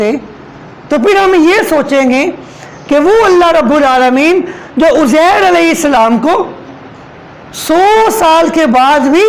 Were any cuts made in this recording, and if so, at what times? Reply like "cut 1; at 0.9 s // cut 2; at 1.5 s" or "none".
none